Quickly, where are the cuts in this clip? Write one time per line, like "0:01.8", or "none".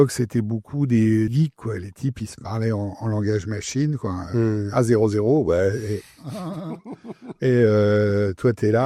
0:01.3